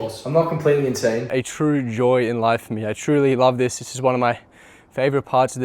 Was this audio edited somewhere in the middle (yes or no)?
yes